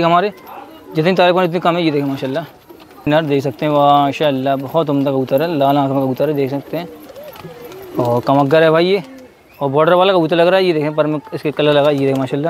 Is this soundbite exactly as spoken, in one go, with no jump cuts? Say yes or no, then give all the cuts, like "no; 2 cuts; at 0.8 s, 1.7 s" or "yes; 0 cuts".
no; 1 cut; at 3.1 s